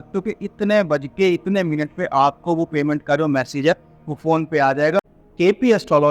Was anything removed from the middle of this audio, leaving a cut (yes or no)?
yes